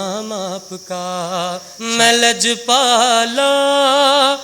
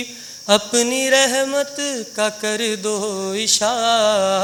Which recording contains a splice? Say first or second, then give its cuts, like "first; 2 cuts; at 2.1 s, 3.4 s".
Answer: first; 1 cut; at 1.7 s